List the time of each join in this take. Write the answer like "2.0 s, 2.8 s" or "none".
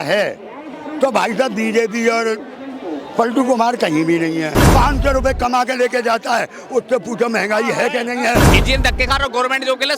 4.6 s, 8.5 s